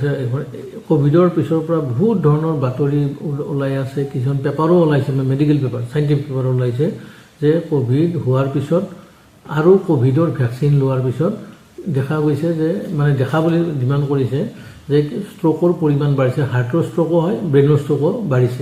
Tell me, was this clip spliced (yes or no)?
no